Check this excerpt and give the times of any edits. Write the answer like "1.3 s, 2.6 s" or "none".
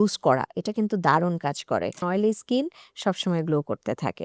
2.0 s